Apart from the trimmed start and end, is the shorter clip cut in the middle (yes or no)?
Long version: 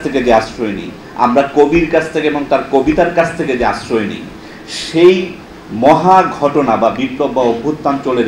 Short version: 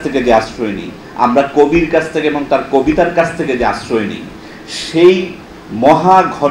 no